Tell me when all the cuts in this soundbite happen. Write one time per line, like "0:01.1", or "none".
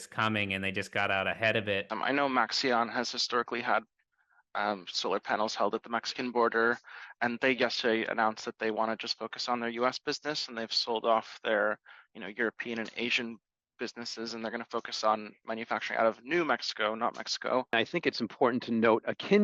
0:01.9
0:17.7